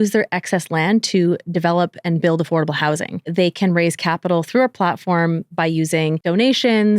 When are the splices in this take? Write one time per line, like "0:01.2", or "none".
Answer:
0:03.3
0:06.2